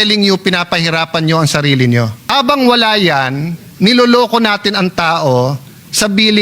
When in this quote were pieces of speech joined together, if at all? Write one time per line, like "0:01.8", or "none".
0:02.2